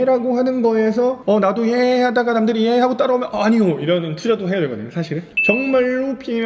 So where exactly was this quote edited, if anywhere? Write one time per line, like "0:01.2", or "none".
0:01.2
0:05.0